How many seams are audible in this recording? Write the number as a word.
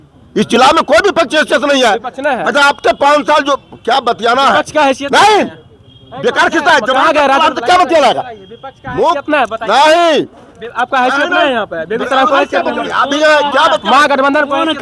zero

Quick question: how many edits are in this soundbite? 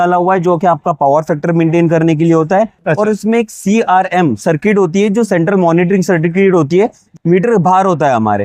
one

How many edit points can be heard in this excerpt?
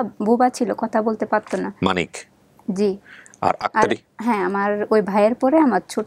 zero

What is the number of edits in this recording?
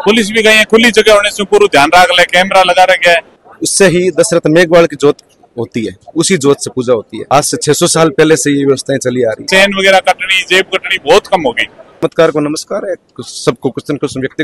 three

